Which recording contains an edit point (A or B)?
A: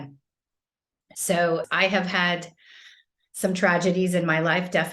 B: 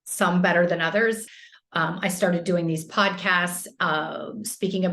B